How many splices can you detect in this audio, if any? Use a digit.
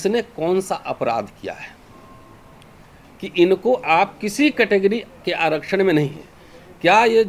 0